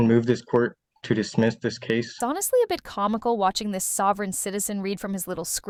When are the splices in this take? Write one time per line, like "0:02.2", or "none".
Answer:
none

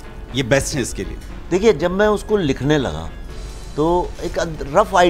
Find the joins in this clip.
none

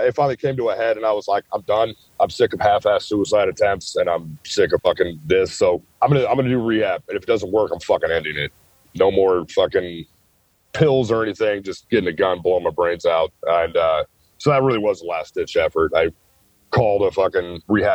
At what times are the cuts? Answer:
0:04.8
0:05.9

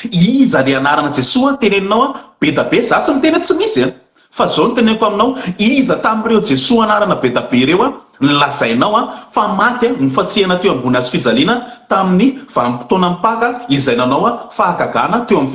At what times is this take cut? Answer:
none

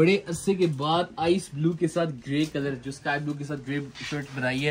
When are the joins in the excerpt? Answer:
none

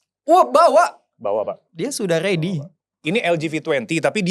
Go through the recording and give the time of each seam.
0:03.0

